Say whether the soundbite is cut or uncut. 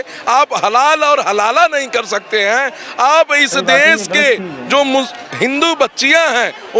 uncut